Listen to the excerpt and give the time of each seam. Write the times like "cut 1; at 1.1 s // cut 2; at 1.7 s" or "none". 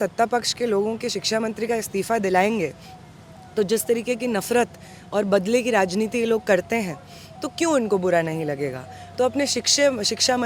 none